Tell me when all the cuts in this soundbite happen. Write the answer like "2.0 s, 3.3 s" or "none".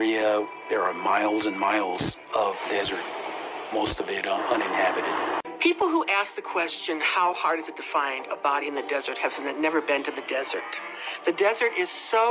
5.4 s